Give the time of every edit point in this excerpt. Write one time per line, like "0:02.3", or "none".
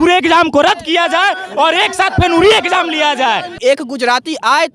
0:03.6